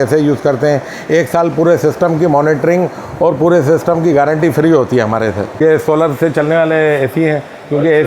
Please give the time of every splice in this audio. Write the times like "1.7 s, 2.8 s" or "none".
5.5 s